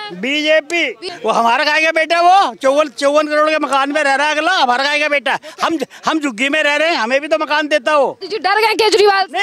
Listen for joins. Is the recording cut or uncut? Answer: cut